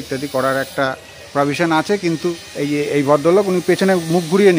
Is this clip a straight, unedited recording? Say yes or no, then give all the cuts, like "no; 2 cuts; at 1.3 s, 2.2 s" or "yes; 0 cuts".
no; 1 cut; at 2.4 s